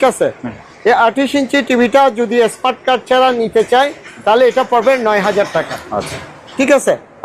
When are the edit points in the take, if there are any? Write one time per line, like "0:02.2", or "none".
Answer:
none

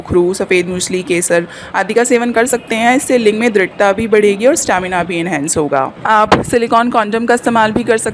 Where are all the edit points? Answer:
0:06.0

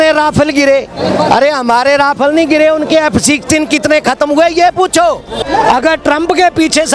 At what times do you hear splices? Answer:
0:05.4

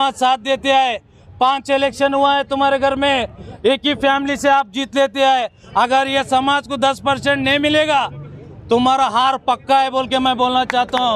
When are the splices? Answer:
0:05.6

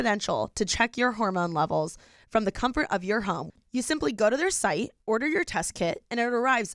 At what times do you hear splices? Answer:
0:03.4

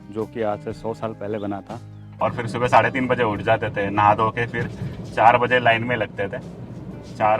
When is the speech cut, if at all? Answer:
0:02.1

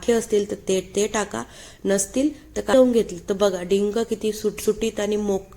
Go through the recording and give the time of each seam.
0:02.7

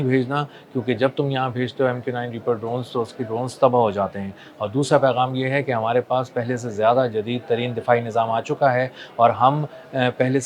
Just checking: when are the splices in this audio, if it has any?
none

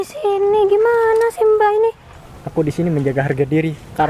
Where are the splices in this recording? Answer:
0:02.2

